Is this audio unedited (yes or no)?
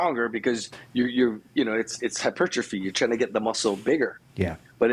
yes